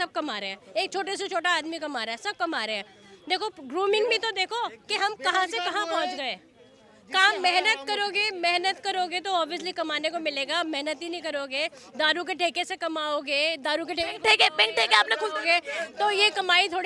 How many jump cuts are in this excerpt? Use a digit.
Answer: 0